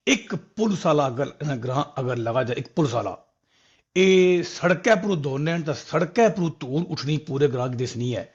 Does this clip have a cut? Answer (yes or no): no